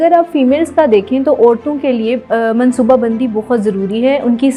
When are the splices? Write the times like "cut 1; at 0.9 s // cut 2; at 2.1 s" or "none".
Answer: none